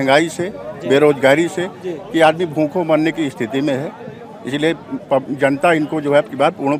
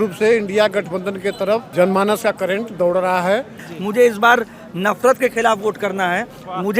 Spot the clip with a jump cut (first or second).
second